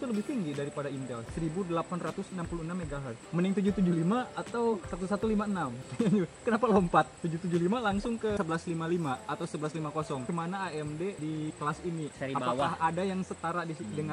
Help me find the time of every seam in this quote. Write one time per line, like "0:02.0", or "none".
0:01.3
0:03.2
0:08.4
0:10.3